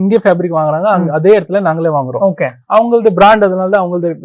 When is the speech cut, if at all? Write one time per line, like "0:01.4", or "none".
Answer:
none